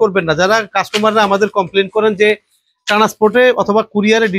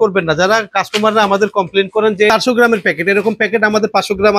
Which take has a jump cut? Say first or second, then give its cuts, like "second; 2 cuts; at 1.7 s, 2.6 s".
second; 1 cut; at 2.3 s